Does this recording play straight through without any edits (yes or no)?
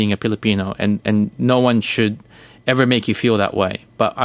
yes